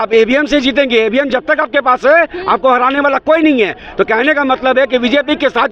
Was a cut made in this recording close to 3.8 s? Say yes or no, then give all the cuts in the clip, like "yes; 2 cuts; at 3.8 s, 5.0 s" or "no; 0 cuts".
no; 0 cuts